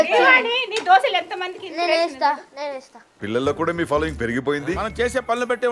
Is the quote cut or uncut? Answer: uncut